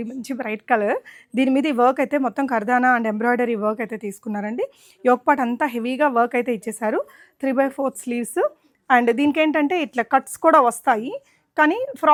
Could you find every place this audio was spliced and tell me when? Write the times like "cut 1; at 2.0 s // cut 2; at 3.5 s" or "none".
none